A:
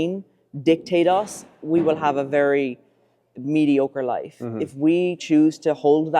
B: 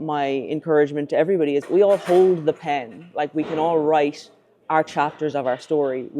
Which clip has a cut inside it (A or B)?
B